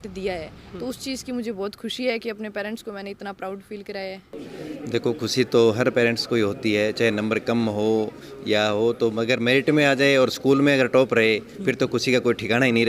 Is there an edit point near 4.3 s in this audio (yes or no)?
yes